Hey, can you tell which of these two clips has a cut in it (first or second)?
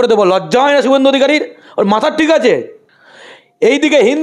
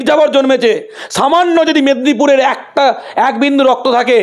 first